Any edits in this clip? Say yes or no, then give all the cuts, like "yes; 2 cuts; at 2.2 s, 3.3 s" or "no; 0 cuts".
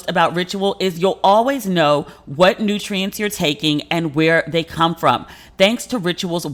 no; 0 cuts